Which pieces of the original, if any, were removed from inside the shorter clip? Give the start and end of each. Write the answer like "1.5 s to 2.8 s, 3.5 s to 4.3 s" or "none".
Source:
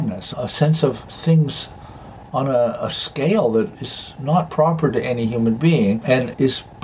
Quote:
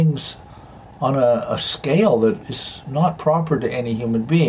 none